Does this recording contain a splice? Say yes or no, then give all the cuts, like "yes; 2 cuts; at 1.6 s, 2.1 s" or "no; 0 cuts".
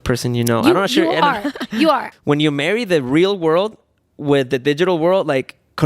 yes; 1 cut; at 2.1 s